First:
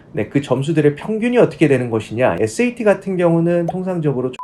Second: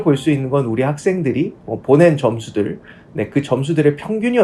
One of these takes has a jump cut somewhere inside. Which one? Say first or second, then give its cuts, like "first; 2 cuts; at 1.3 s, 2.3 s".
first; 1 cut; at 2.4 s